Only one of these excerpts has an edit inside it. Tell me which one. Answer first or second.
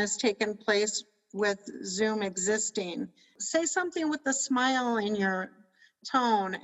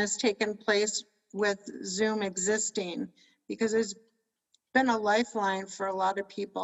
first